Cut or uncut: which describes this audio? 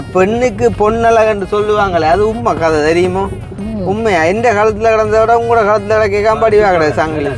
uncut